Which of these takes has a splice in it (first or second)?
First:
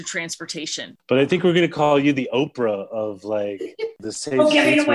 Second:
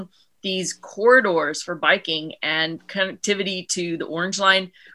first